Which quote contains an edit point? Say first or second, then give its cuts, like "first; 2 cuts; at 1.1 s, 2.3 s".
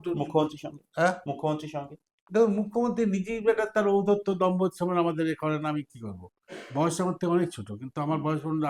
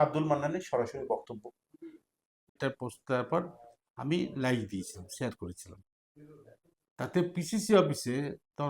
second; 1 cut; at 2.6 s